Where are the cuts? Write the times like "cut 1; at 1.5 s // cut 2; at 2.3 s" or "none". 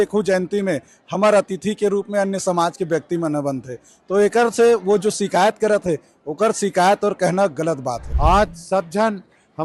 cut 1; at 8.1 s